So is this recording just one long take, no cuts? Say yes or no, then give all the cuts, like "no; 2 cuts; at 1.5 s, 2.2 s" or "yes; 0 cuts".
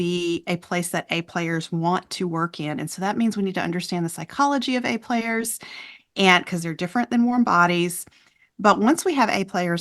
yes; 0 cuts